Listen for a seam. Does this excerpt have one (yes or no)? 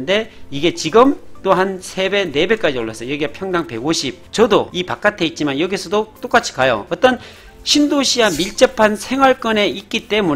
yes